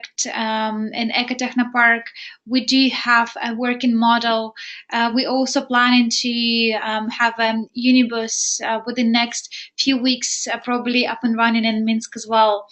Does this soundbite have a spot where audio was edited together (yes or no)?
no